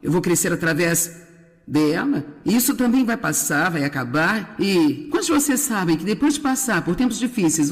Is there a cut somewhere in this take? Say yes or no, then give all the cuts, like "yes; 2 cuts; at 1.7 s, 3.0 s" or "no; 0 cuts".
no; 0 cuts